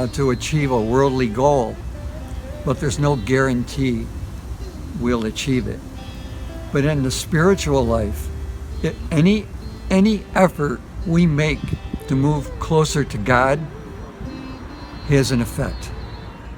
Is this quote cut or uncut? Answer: uncut